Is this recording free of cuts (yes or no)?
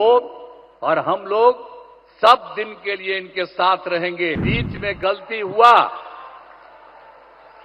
no